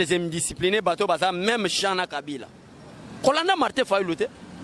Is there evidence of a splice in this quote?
no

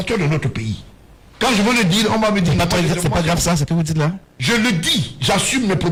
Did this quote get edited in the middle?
no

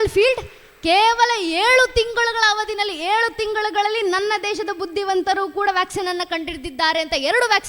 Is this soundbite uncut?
yes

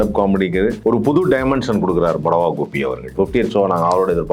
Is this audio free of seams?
no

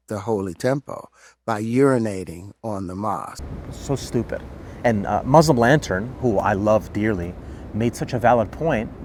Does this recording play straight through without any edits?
yes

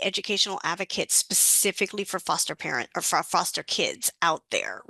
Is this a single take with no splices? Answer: yes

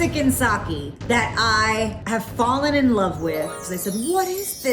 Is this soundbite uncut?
no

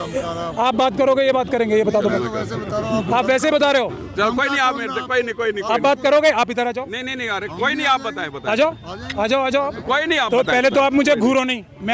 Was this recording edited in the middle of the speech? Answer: no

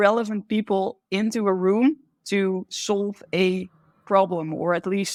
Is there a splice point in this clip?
no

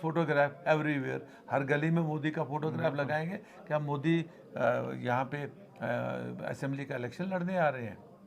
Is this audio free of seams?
yes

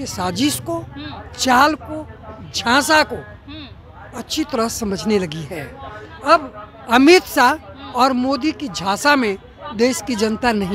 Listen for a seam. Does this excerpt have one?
no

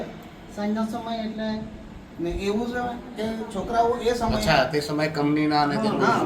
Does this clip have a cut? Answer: no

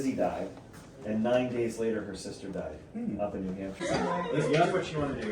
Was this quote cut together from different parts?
yes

